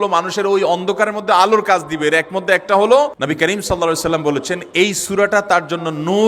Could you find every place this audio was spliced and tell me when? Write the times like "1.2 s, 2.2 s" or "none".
3.1 s